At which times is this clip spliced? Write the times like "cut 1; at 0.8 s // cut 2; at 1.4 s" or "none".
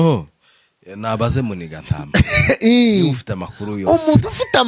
none